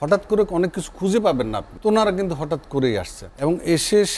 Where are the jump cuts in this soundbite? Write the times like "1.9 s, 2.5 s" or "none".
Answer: 1.7 s, 3.2 s